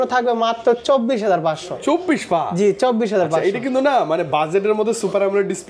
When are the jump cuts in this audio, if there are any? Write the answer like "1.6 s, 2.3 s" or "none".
none